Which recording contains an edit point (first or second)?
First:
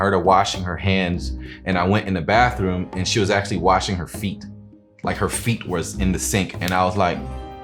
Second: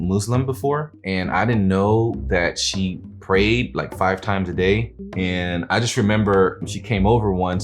second